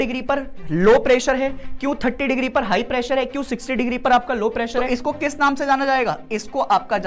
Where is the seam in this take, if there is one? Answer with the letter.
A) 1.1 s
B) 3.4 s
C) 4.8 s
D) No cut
C